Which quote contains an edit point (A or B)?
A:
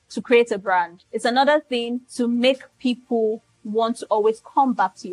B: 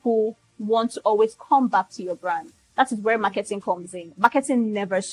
A